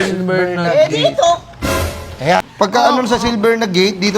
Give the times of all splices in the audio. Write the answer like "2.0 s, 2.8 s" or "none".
2.5 s